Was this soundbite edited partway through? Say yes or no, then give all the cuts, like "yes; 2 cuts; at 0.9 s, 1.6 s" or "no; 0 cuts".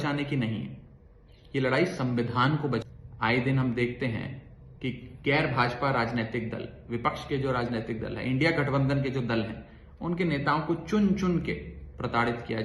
yes; 1 cut; at 2.9 s